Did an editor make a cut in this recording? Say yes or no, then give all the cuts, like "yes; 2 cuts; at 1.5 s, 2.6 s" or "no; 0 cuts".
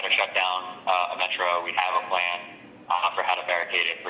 no; 0 cuts